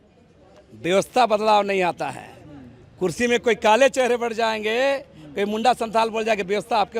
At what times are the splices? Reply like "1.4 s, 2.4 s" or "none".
none